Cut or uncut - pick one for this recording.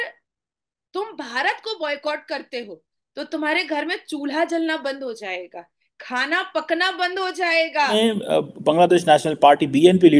cut